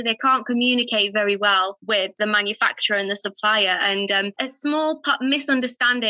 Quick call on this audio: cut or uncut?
cut